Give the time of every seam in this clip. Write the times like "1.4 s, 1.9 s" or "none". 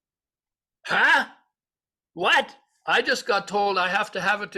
none